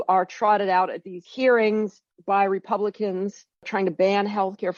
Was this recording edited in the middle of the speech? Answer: no; 0 cuts

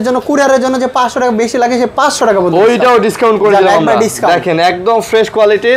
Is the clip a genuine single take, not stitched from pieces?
yes; 0 cuts

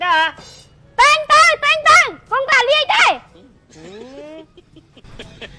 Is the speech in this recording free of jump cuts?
yes; 0 cuts

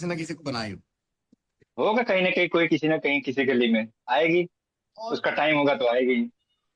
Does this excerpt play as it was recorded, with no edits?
yes; 0 cuts

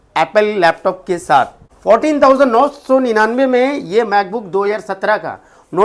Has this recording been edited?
yes; 1 cut; at 1.6 s

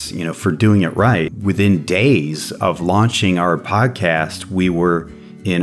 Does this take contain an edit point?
yes; 1 cut; at 1.3 s

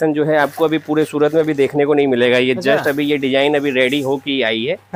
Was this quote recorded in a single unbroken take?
yes; 0 cuts

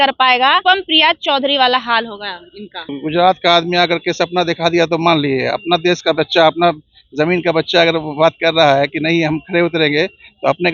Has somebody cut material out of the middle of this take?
yes; 1 cut; at 2.9 s

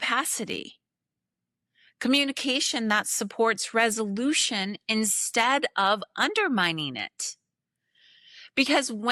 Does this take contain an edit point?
no; 0 cuts

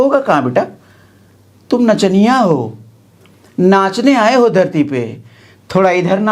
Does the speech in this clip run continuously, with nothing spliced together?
yes; 0 cuts

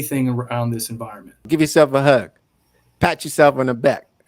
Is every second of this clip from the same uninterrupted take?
no; 1 cut; at 1.5 s

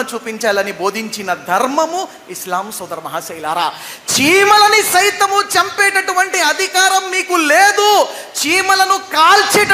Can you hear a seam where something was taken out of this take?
no; 0 cuts

